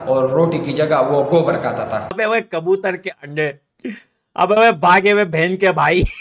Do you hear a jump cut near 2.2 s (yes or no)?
yes